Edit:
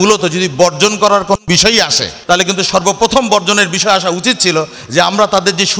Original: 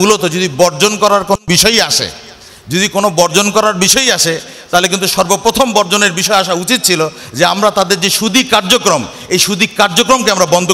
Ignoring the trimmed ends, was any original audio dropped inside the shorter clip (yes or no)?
yes